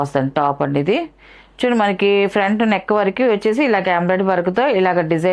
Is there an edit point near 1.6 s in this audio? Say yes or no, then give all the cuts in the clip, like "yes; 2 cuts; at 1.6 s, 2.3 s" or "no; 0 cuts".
no; 0 cuts